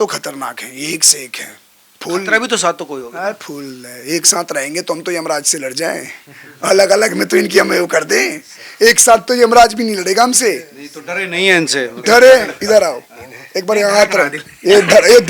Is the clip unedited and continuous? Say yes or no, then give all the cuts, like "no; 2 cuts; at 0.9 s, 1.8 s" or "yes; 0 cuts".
yes; 0 cuts